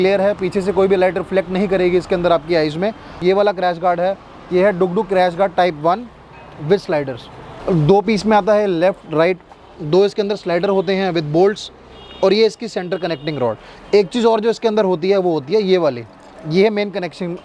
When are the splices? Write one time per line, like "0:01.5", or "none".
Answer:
0:03.2
0:07.6